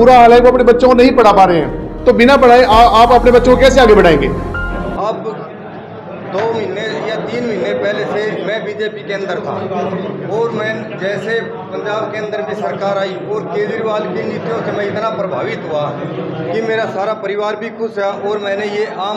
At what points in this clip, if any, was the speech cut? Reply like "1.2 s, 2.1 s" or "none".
4.4 s